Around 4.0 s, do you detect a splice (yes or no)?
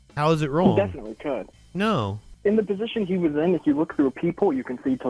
no